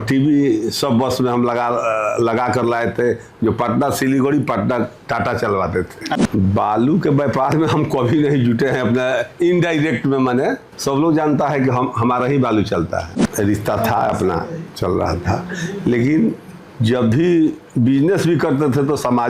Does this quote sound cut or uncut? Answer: cut